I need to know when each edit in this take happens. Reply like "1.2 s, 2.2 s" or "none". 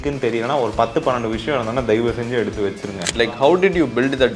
3.2 s